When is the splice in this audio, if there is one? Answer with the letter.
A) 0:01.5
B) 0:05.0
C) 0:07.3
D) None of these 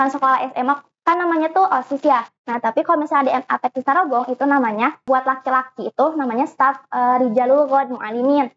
B